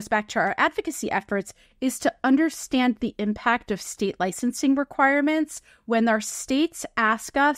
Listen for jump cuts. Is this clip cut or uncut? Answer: uncut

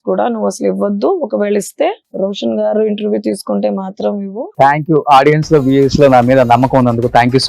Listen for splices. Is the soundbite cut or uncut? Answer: cut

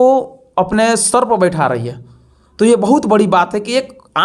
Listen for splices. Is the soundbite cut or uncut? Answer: uncut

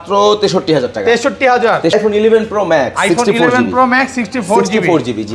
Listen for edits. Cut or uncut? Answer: cut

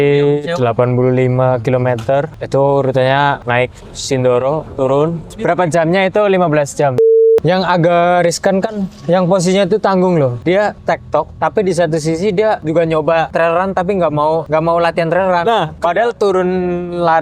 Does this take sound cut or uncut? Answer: cut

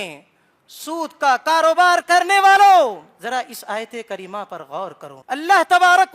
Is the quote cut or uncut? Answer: cut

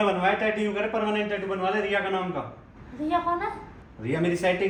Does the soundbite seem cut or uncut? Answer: uncut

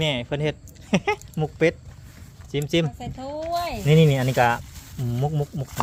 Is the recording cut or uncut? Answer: uncut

